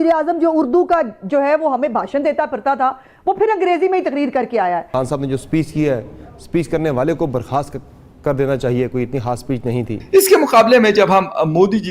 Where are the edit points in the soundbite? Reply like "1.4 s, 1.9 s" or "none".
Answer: 5.1 s, 10.0 s